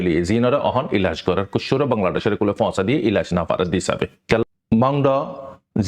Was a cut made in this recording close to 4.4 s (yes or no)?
yes